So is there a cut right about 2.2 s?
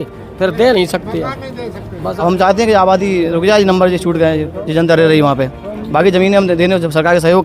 yes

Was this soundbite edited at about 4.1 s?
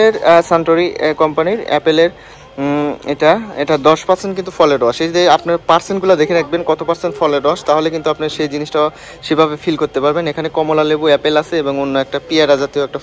no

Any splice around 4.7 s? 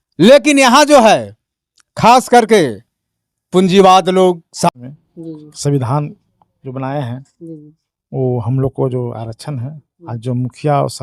yes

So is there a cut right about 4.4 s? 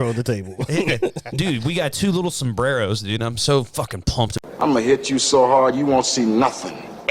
yes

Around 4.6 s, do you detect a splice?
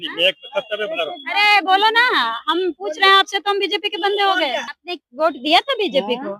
yes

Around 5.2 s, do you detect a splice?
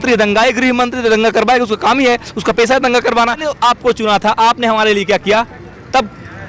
no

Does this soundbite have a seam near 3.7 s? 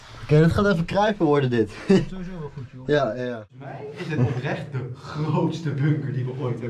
yes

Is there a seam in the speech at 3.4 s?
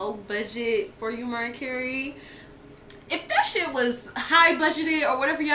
yes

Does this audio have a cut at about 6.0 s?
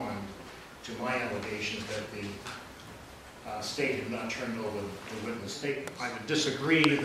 yes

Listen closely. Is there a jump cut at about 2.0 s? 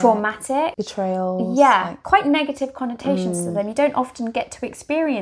yes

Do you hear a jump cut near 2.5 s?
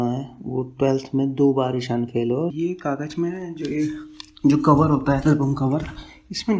yes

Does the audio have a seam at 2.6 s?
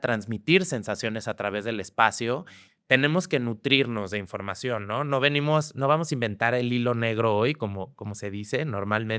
yes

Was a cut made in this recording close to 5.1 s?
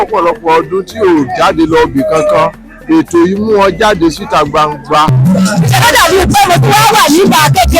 yes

